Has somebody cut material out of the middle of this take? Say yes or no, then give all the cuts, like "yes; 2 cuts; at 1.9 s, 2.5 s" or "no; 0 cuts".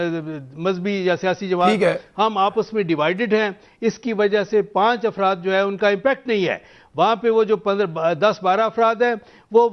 no; 0 cuts